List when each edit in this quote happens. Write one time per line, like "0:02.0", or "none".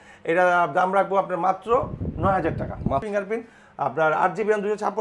0:03.0